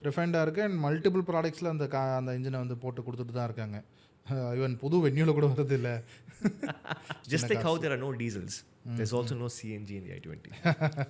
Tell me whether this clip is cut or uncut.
cut